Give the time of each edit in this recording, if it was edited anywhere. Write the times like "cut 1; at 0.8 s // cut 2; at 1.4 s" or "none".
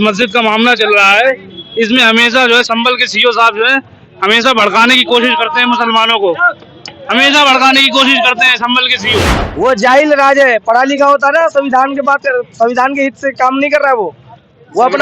cut 1; at 9.4 s